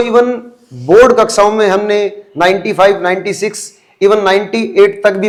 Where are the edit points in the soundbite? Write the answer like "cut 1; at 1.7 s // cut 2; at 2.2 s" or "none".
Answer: none